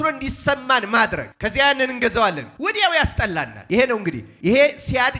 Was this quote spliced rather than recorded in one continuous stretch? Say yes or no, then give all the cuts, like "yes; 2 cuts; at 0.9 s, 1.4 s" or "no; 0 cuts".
yes; 4 cuts; at 1.3 s, 2.5 s, 3.6 s, 4.3 s